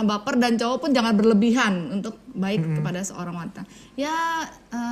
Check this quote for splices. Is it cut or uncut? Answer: uncut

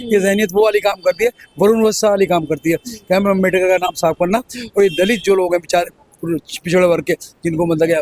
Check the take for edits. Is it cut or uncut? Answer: uncut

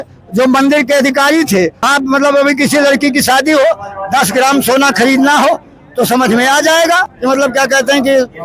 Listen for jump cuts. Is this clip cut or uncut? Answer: cut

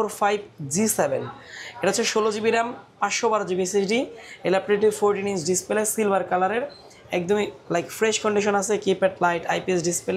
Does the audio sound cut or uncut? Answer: uncut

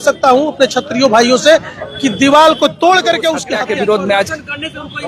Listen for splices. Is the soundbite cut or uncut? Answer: cut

